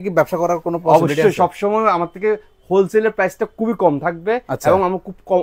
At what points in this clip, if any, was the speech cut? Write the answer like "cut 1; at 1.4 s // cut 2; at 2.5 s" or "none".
none